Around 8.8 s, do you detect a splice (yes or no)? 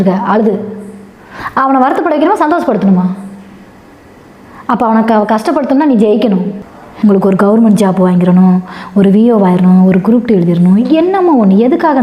no